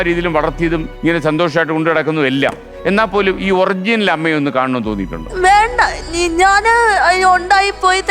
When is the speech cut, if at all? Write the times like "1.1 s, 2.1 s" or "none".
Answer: 0.9 s, 5.3 s